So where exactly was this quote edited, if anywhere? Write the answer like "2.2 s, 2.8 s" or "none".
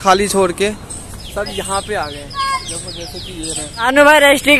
3.7 s